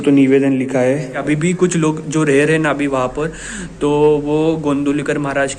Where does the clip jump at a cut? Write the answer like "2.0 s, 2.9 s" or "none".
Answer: 1.2 s